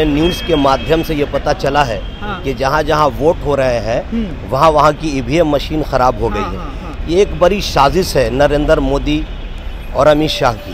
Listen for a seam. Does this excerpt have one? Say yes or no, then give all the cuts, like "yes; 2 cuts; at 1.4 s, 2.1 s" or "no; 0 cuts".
no; 0 cuts